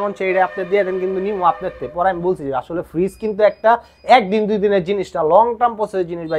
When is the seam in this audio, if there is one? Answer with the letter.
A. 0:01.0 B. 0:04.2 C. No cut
C